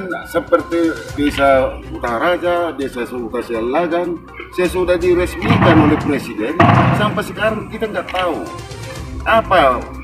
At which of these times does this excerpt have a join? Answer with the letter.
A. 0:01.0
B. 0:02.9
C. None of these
A